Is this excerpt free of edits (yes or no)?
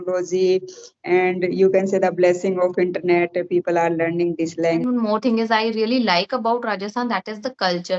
no